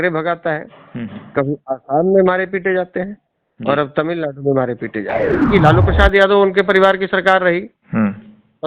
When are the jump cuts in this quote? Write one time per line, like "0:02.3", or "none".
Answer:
0:05.5